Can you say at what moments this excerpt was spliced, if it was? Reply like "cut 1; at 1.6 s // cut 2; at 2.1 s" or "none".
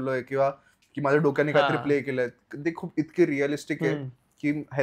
none

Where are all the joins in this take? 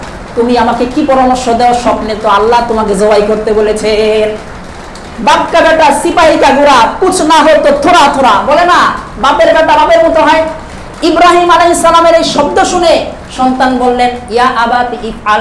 none

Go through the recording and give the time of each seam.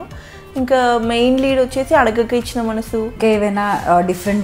cut 1; at 3.2 s

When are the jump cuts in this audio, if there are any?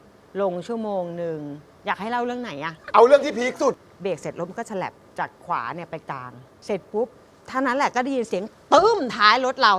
cut 1; at 2.5 s // cut 2; at 3.9 s

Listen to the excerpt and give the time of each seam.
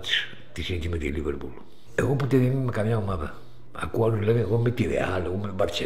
none

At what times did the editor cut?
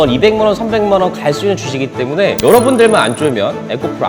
none

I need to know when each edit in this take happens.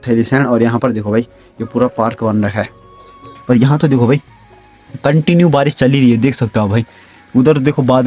cut 1; at 3.3 s

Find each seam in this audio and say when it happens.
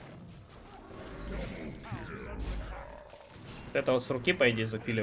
cut 1; at 1.2 s

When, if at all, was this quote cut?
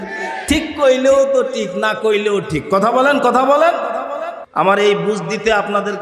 cut 1; at 4.4 s

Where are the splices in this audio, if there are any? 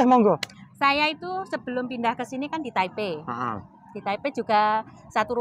none

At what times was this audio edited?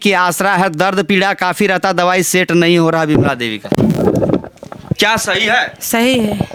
none

